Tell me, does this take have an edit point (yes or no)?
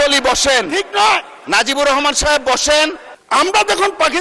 yes